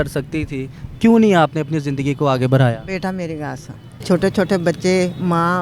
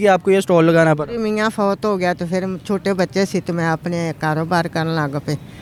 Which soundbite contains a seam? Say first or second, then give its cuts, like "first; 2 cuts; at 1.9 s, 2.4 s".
first; 1 cut; at 4.0 s